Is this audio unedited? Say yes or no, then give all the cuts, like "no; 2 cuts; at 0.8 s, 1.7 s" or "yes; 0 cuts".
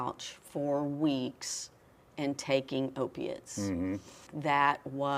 no; 1 cut; at 4.3 s